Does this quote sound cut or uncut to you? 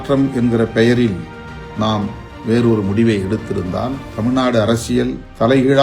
uncut